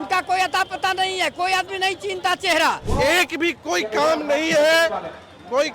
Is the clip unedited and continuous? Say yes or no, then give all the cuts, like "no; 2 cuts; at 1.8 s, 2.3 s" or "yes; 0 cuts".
no; 1 cut; at 2.8 s